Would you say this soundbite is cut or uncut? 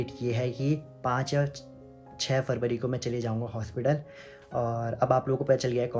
uncut